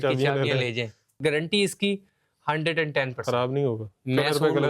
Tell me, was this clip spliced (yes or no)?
yes